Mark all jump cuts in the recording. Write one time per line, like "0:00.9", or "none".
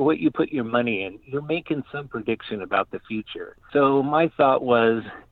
none

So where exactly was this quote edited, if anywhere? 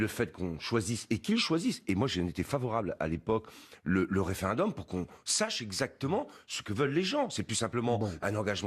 0:03.6

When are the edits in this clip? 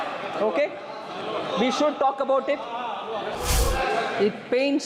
0:03.3

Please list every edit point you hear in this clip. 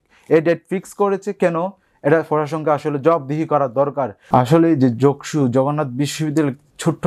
0:04.2

